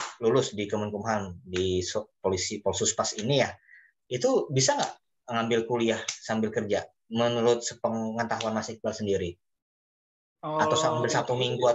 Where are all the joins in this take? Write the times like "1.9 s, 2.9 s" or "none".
none